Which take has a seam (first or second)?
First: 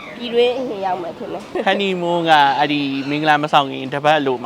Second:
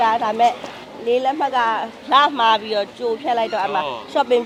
first